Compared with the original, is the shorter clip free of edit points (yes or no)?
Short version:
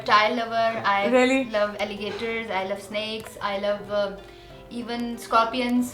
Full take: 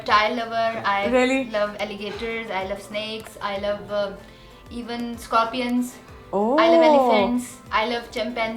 yes